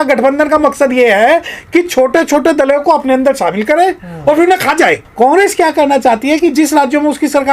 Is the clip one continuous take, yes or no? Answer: no